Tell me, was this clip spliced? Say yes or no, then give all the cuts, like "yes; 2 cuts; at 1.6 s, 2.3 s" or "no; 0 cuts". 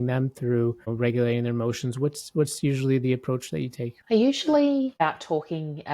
yes; 3 cuts; at 0.9 s, 3.9 s, 5.0 s